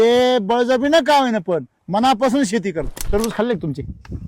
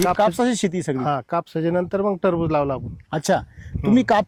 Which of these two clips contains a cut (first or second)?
first